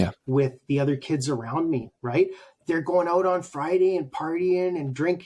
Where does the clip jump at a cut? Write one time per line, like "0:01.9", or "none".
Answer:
none